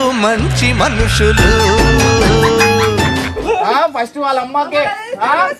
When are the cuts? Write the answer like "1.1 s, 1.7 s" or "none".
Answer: 3.3 s